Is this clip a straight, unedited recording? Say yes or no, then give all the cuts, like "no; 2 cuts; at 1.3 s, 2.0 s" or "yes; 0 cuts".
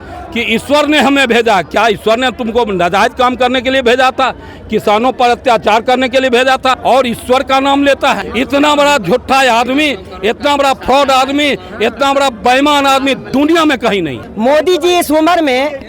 no; 3 cuts; at 6.8 s, 8.3 s, 14.2 s